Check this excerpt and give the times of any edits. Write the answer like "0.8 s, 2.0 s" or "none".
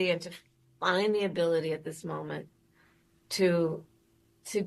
2.0 s